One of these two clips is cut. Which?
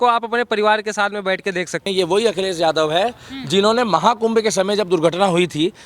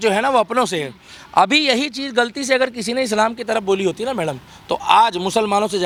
first; 1 cut; at 1.8 s

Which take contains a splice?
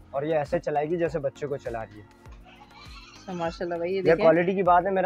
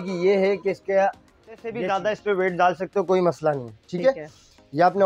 second; 1 cut; at 1.9 s

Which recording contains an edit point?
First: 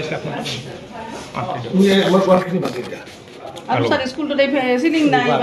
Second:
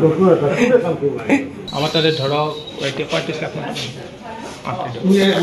second; 1 cut; at 1.5 s

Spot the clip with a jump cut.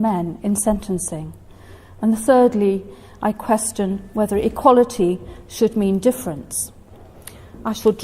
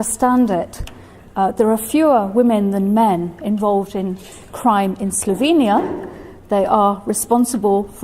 second; 1 cut; at 6.8 s

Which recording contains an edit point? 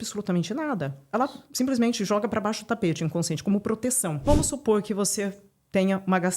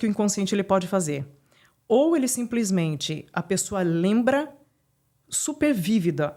first; 1 cut; at 4.3 s

